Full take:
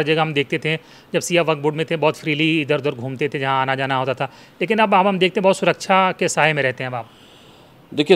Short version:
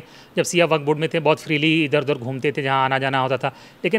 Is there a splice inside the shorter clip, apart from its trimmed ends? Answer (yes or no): no